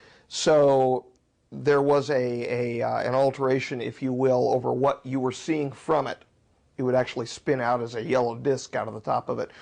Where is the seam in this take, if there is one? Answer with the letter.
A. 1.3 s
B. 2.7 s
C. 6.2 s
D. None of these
D